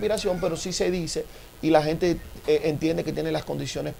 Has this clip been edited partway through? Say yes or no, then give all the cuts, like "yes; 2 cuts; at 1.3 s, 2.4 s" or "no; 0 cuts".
no; 0 cuts